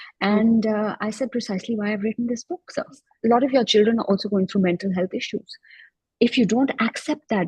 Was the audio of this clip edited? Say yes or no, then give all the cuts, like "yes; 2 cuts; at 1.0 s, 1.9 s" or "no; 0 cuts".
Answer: yes; 1 cut; at 3.1 s